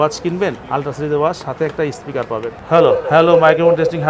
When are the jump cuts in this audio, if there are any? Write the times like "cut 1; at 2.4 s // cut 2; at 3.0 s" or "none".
cut 1; at 2.5 s

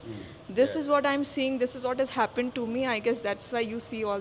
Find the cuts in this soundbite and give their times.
none

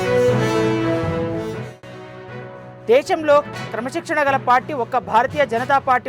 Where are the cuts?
cut 1; at 1.6 s

